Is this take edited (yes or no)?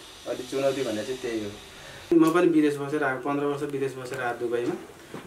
yes